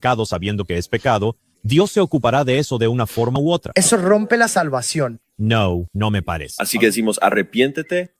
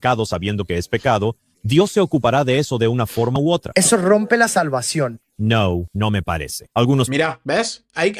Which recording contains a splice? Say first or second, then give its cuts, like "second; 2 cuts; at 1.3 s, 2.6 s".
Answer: first; 1 cut; at 6.5 s